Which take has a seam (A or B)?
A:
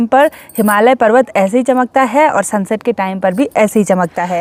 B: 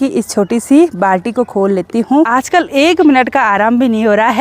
B